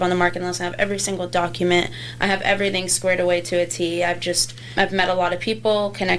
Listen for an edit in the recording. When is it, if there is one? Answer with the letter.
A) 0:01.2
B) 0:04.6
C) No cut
B